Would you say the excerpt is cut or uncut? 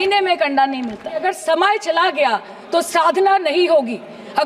cut